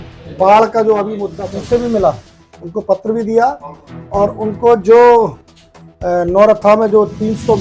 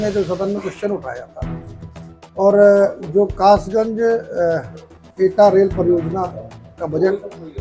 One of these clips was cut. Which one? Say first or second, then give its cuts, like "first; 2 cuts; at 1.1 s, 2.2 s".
first; 1 cut; at 1.2 s